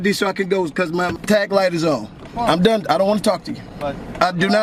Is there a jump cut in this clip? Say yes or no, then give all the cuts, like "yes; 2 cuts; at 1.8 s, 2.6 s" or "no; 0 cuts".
yes; 2 cuts; at 1.2 s, 2.2 s